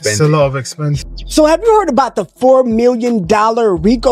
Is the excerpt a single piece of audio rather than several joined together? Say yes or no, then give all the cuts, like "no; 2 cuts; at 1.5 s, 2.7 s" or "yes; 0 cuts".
no; 1 cut; at 1.0 s